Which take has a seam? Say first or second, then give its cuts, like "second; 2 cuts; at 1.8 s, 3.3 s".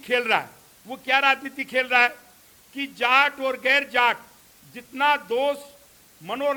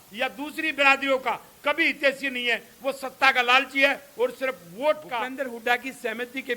second; 1 cut; at 5.2 s